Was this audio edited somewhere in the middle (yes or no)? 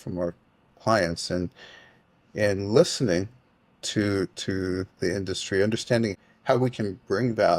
yes